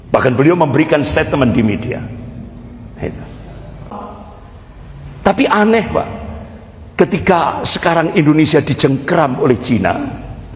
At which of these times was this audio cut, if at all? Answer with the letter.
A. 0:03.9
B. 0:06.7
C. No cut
A